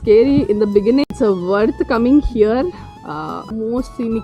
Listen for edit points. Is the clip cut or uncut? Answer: cut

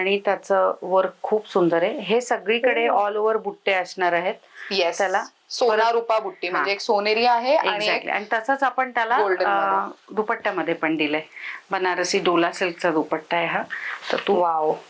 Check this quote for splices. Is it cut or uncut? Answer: uncut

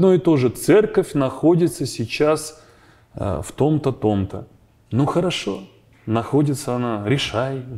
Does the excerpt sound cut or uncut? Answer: uncut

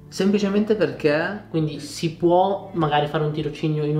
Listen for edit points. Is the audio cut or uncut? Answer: cut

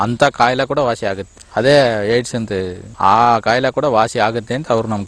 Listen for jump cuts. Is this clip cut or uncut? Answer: cut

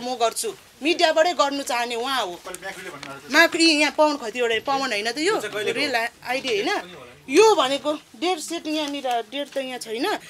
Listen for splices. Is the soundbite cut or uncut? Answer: uncut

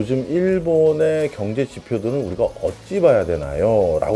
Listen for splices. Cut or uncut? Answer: uncut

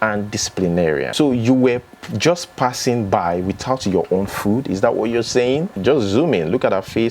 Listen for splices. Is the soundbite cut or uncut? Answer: cut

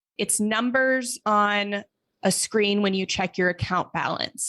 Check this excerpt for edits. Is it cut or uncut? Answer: uncut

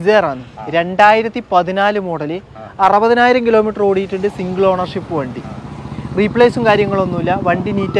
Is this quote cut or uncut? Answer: uncut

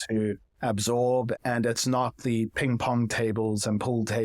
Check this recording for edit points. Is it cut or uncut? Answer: cut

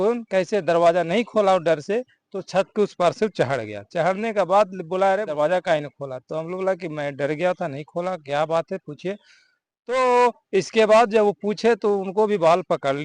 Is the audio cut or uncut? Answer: cut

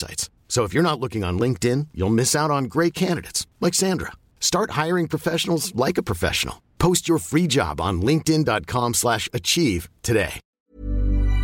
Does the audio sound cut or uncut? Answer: cut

